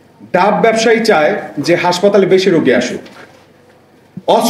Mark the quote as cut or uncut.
uncut